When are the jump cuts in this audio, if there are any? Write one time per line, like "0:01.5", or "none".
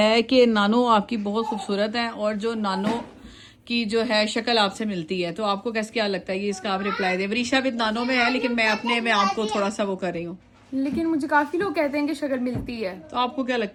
none